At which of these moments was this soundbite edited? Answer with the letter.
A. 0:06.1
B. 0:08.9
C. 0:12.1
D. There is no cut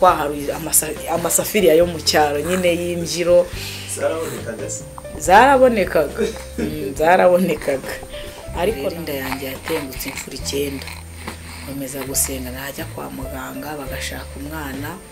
B